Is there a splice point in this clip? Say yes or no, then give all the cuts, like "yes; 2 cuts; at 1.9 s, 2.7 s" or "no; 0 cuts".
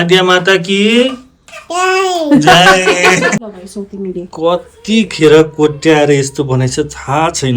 yes; 1 cut; at 3.4 s